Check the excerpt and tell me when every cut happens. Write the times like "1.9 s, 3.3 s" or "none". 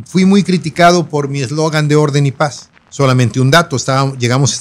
2.8 s